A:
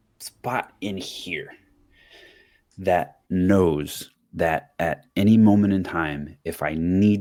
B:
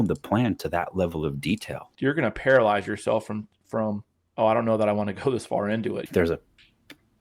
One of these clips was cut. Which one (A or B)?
B